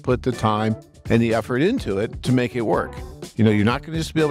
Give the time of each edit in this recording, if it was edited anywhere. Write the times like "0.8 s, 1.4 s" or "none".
2.2 s, 3.2 s

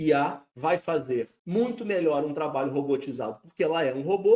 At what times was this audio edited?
0.9 s

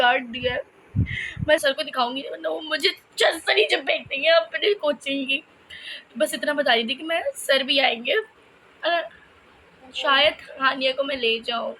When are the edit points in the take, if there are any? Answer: 1.6 s

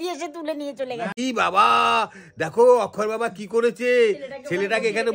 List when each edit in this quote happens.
1.1 s

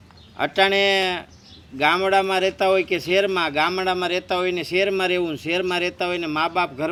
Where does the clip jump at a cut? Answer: none

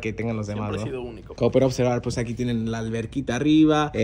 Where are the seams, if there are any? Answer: 1.2 s

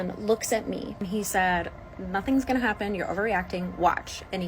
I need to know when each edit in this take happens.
1.0 s

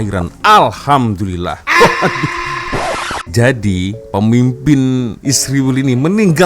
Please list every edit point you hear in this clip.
2.7 s

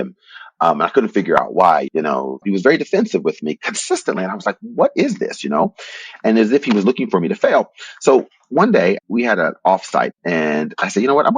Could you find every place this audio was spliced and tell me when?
2.4 s, 9.0 s, 10.1 s

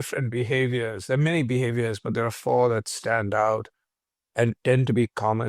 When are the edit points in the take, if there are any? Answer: none

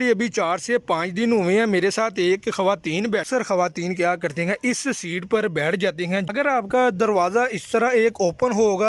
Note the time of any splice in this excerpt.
2.9 s, 6.2 s

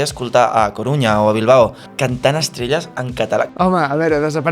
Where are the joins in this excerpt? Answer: 1.8 s, 3.5 s

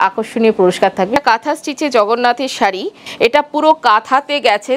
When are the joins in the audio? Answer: 1.2 s, 3.0 s

